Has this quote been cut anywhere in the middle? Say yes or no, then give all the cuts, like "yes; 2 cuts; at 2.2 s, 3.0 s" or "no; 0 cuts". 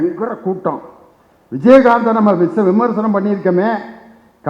no; 0 cuts